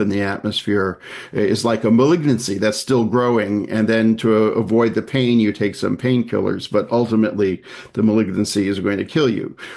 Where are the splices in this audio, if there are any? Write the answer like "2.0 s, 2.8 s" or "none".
none